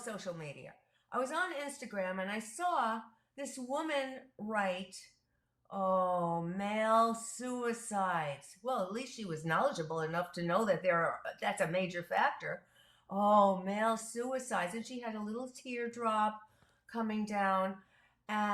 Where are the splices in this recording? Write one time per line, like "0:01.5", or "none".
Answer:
none